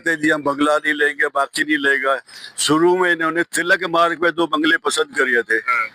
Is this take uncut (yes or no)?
yes